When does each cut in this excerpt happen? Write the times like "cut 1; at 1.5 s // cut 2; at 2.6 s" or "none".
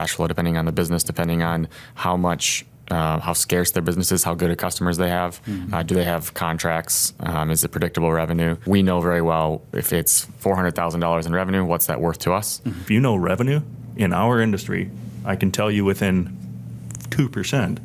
cut 1; at 8.6 s // cut 2; at 12.8 s